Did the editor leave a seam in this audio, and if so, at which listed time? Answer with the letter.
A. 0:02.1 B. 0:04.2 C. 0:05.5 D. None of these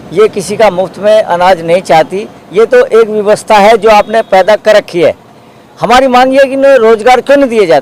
D